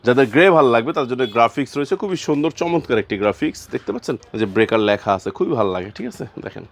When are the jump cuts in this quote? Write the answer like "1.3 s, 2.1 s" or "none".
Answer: 4.3 s

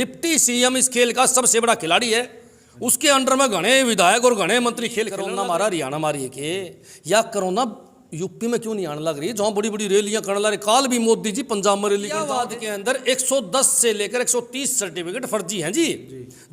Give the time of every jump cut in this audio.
5.2 s, 12.3 s

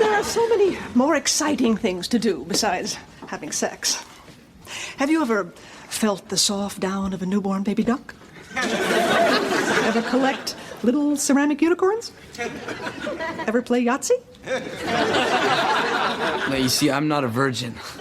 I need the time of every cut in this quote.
15.8 s

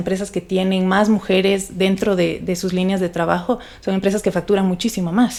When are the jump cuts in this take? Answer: none

